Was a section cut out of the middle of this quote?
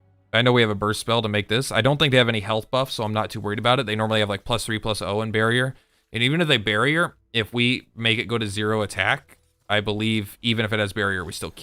no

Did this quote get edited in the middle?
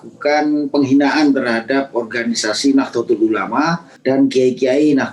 yes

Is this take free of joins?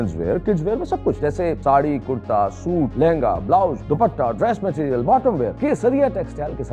no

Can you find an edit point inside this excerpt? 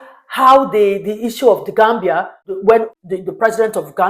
yes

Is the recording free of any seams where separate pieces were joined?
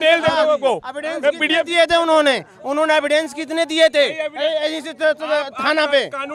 yes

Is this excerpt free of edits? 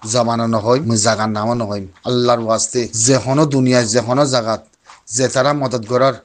no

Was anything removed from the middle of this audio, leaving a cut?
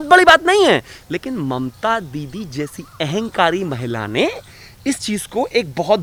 no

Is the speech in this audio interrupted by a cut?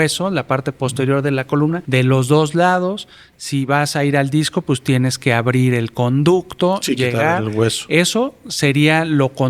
yes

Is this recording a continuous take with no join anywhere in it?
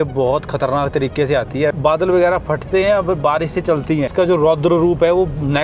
no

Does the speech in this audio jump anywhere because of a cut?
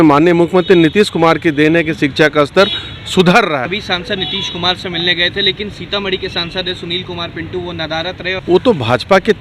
yes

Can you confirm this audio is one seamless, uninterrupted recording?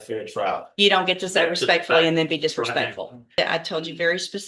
no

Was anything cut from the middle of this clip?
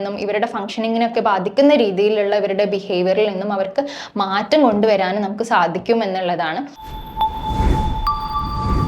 yes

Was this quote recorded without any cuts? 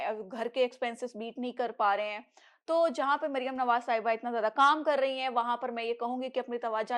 yes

